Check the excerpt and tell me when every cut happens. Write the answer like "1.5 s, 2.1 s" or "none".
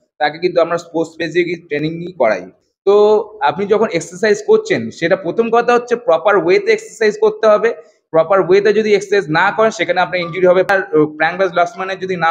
2.6 s, 10.7 s